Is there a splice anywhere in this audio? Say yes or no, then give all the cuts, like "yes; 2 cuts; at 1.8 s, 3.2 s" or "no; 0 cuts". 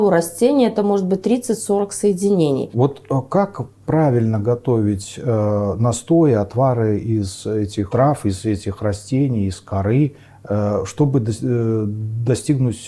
yes; 1 cut; at 2.7 s